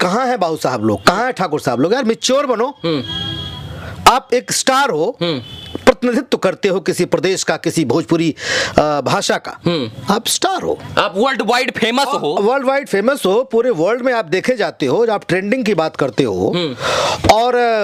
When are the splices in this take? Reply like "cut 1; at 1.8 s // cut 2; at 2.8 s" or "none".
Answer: none